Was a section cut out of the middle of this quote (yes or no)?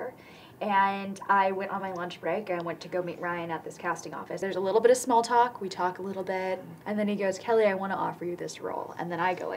yes